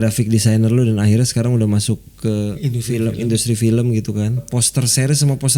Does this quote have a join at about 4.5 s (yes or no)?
yes